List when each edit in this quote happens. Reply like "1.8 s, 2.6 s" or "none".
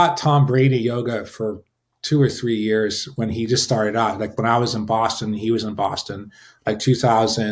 none